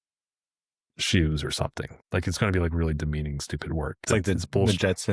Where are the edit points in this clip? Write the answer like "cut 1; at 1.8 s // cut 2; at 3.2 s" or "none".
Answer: cut 1; at 1.9 s // cut 2; at 4.0 s